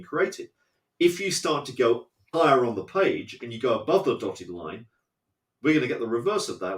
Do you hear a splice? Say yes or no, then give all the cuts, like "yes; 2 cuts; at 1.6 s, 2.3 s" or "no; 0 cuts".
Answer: no; 0 cuts